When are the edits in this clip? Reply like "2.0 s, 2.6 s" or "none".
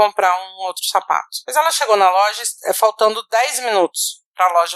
1.4 s